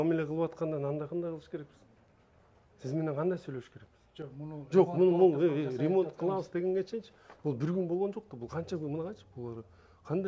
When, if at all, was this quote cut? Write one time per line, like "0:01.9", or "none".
none